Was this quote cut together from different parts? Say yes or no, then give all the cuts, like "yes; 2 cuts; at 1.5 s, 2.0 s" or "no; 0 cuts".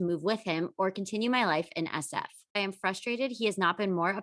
yes; 1 cut; at 2.6 s